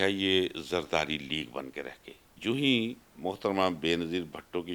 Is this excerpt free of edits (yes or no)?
yes